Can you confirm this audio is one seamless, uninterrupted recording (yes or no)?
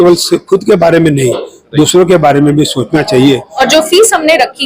no